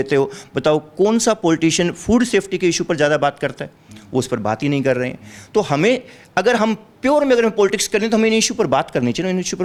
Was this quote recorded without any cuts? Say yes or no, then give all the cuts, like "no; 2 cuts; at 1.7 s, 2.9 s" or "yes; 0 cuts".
yes; 0 cuts